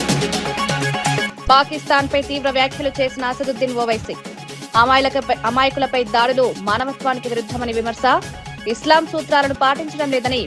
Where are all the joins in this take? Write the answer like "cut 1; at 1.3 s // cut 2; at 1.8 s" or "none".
cut 1; at 1.2 s